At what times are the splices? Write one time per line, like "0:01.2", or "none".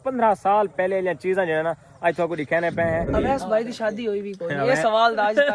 0:03.1